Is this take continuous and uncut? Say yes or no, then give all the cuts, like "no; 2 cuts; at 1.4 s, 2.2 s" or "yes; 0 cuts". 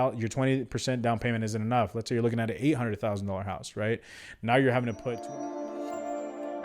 no; 1 cut; at 5.1 s